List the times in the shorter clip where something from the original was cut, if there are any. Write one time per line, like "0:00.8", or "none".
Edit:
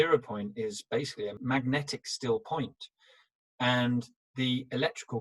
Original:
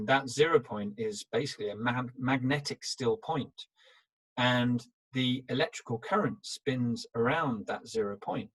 0:01.4